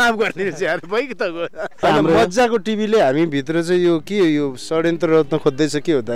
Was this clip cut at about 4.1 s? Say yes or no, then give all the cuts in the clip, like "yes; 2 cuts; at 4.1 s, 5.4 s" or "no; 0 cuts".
no; 1 cut; at 1.8 s